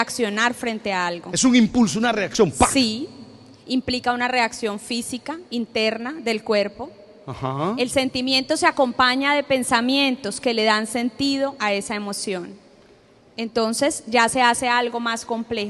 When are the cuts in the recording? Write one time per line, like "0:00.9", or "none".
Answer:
0:04.3